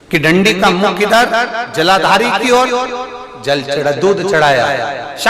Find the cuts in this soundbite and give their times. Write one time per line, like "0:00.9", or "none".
none